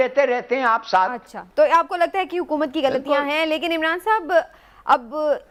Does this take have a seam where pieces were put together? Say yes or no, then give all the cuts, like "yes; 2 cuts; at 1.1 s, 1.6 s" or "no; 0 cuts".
no; 0 cuts